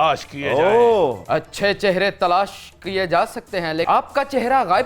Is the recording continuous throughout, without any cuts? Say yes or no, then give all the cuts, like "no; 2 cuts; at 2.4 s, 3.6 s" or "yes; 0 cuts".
no; 2 cuts; at 1.2 s, 3.8 s